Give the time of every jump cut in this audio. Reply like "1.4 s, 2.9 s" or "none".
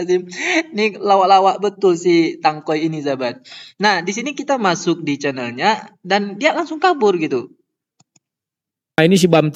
none